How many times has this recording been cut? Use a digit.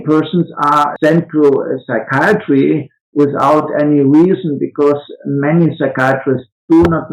1